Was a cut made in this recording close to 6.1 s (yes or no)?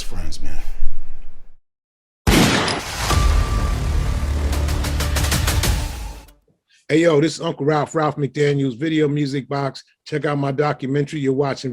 yes